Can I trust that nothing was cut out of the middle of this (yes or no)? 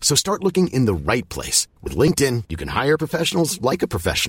yes